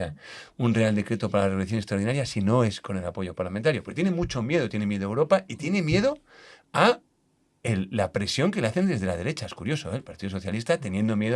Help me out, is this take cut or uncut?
uncut